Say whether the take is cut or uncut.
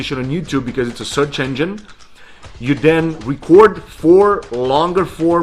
cut